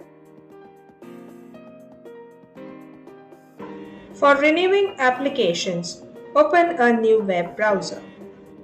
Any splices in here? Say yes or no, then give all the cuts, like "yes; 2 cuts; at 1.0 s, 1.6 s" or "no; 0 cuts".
no; 0 cuts